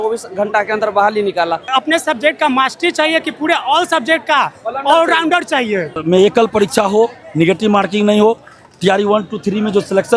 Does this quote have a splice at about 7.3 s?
no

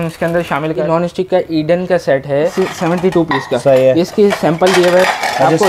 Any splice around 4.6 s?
no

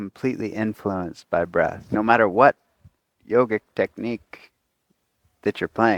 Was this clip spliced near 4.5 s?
no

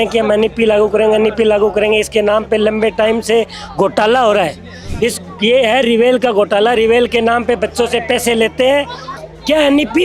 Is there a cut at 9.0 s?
yes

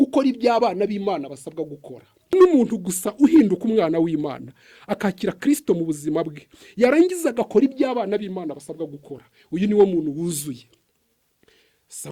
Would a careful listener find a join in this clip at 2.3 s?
yes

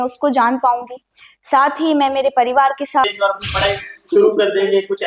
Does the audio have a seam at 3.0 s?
yes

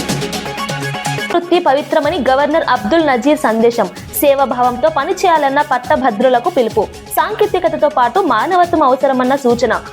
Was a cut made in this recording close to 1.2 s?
yes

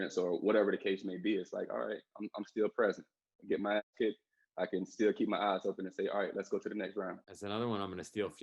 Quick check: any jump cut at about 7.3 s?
yes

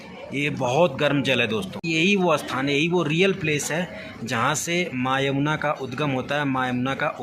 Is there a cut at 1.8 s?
yes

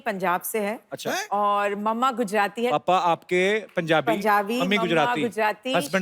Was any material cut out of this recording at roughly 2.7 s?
yes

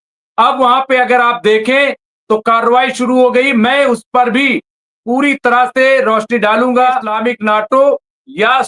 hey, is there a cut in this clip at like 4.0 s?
no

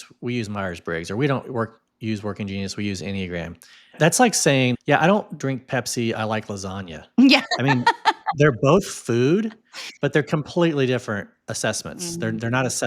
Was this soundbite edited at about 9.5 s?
no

